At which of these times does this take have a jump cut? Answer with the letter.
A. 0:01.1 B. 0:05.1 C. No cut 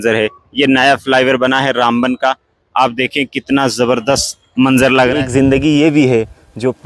B